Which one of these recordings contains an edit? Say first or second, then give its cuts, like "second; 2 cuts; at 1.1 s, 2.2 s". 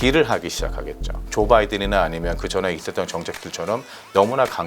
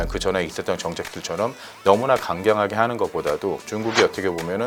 first; 1 cut; at 1.2 s